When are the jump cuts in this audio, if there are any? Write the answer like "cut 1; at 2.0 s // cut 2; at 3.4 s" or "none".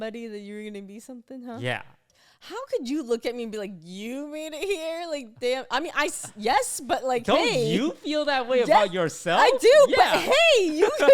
cut 1; at 2.2 s